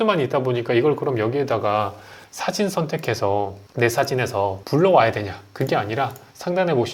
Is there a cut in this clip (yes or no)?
yes